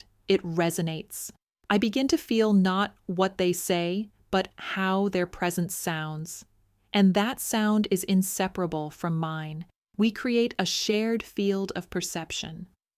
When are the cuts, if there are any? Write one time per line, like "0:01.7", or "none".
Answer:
none

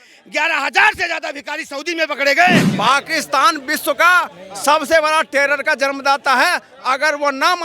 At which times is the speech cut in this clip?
0:02.7

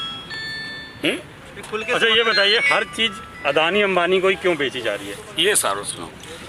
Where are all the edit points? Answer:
none

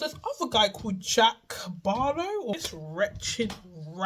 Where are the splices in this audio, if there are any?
0:02.5

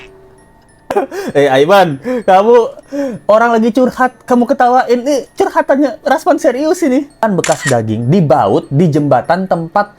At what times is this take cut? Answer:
0:00.9
0:07.2

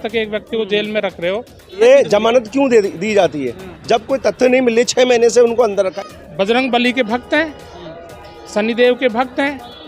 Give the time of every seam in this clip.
0:01.8
0:05.9

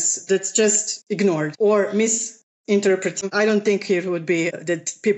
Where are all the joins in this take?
0:03.2

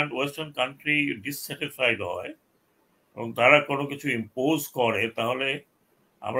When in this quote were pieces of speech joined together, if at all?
none

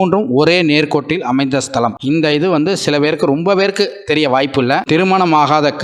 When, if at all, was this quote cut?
0:02.0
0:04.8

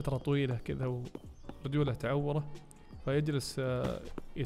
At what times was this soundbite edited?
none

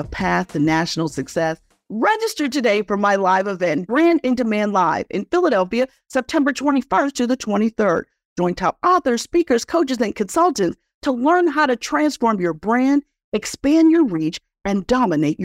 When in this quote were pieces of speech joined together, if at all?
none

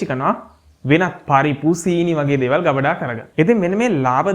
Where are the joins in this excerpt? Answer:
0:03.2

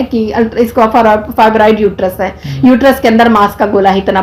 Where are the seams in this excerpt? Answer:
none

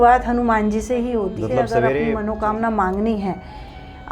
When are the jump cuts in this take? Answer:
0:02.1

